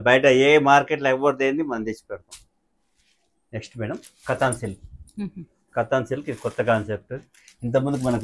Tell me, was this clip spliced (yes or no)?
no